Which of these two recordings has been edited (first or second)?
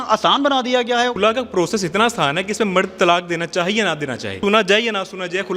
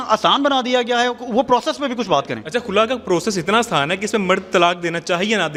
first